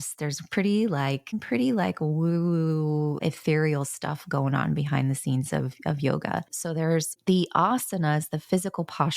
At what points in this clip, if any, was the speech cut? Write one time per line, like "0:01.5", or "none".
0:01.3
0:03.2
0:07.1